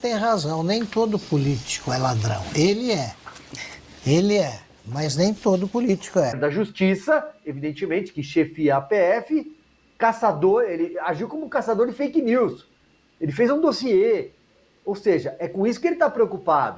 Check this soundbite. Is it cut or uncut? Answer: cut